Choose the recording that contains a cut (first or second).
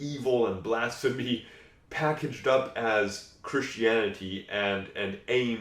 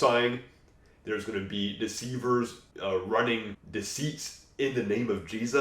second